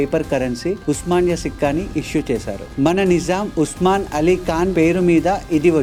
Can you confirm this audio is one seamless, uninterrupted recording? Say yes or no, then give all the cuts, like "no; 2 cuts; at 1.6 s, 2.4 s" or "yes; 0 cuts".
yes; 0 cuts